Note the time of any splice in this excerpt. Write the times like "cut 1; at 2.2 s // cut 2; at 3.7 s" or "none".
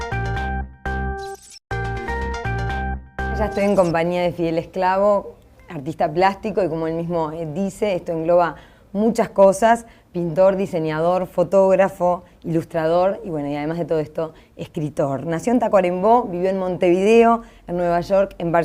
none

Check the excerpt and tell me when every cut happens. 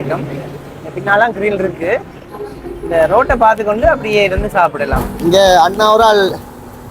cut 1; at 5.1 s

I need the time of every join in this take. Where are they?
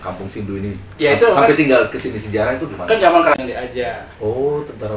cut 1; at 3.3 s

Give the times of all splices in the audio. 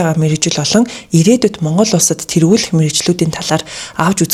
none

